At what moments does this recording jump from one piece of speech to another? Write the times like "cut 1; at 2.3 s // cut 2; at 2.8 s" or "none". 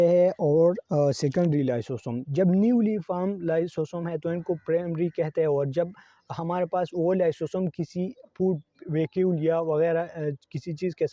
none